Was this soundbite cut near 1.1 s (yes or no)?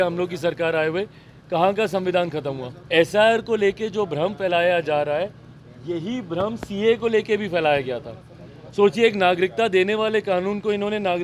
no